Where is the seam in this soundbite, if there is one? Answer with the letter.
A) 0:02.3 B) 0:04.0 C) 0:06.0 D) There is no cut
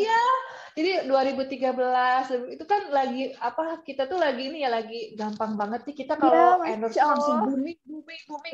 D